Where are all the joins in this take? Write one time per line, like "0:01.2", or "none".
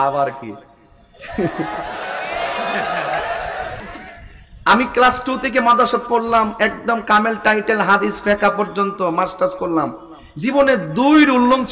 0:03.9